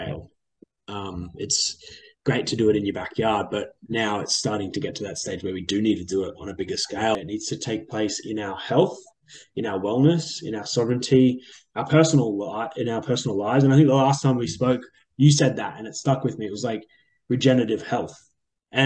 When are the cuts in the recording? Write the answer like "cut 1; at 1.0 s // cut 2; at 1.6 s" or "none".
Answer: cut 1; at 7.2 s